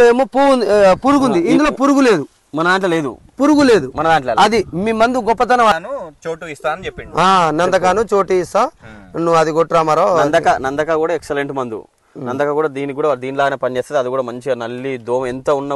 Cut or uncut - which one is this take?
cut